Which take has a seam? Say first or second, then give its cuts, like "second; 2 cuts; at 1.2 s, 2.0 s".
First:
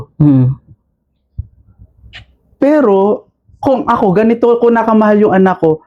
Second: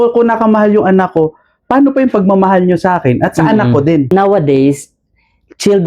second; 1 cut; at 4.1 s